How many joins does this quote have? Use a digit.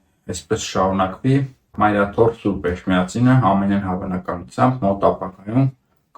1